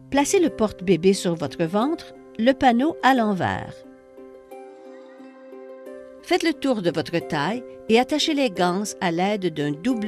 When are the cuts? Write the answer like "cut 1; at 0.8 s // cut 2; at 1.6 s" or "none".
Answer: cut 1; at 6.3 s